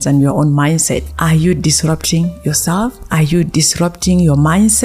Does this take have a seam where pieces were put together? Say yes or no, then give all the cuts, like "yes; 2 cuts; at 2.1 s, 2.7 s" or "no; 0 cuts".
yes; 1 cut; at 1.1 s